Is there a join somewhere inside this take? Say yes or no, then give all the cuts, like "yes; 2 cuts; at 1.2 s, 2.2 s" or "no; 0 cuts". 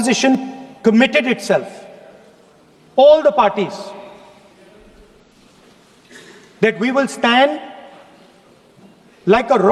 no; 0 cuts